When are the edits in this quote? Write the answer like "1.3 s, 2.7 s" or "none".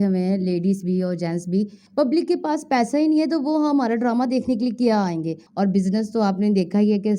1.8 s, 5.4 s